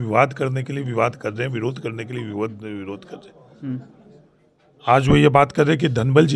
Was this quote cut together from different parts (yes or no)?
no